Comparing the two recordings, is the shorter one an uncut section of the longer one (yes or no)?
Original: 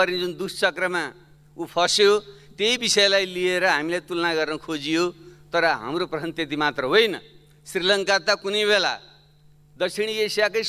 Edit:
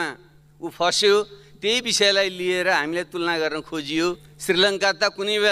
no